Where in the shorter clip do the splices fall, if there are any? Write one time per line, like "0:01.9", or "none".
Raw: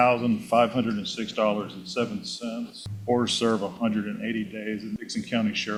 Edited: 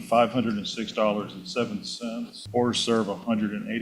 0:02.3